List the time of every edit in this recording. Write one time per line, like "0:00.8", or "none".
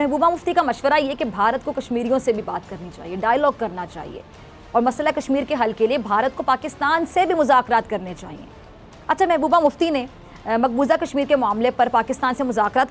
none